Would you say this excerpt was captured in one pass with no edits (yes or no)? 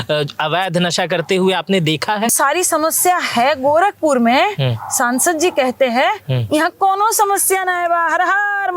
no